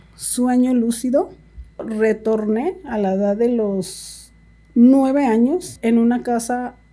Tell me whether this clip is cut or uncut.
cut